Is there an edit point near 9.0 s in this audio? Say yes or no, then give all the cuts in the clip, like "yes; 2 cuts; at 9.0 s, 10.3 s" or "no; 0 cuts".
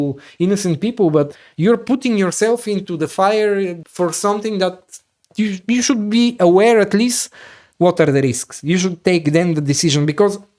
no; 2 cuts; at 1.4 s, 3.8 s